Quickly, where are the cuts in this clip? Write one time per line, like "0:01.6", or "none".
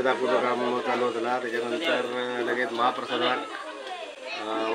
none